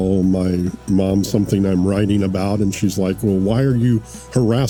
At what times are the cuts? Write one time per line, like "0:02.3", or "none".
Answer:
none

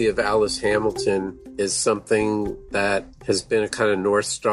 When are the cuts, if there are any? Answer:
0:01.4
0:03.1

